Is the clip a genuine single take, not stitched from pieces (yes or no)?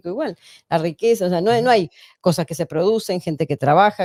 yes